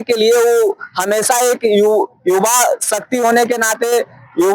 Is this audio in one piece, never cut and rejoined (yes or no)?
yes